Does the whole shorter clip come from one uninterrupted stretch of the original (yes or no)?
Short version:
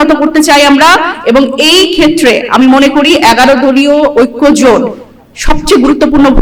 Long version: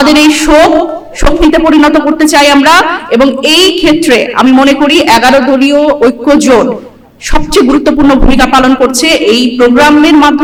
yes